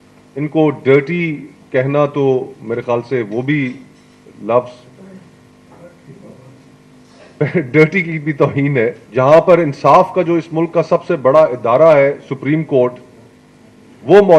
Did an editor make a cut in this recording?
yes; 1 cut; at 9.0 s

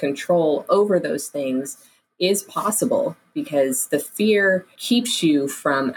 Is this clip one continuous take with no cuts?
no; 1 cut; at 4.7 s

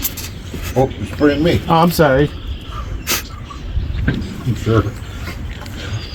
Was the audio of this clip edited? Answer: no; 0 cuts

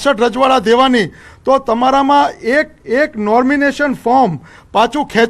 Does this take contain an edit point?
yes; 1 cut; at 2.8 s

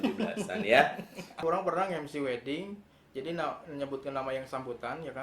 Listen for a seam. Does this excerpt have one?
yes; 1 cut; at 1.3 s

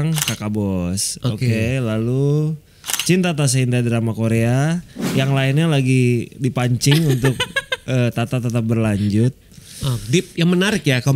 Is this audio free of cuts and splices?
yes; 0 cuts

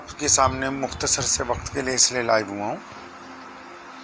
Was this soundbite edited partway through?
no; 0 cuts

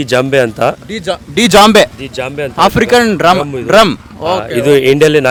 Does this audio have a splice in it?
no; 0 cuts

